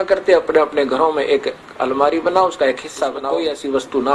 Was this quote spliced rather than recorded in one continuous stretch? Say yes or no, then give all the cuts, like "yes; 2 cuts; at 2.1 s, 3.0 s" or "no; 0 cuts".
yes; 1 cut; at 3.2 s